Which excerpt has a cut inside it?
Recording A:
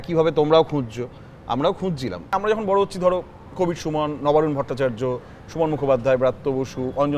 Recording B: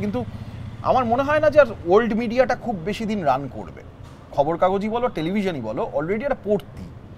A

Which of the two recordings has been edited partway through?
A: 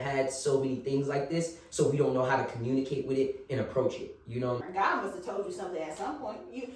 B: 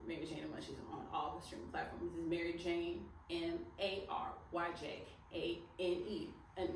A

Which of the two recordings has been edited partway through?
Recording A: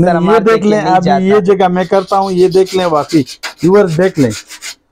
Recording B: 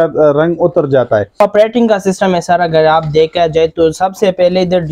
B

